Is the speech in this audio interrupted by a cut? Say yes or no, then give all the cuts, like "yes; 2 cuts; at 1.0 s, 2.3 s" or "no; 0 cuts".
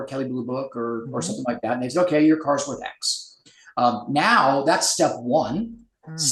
no; 0 cuts